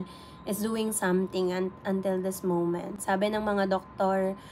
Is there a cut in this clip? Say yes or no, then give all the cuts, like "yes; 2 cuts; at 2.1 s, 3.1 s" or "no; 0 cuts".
no; 0 cuts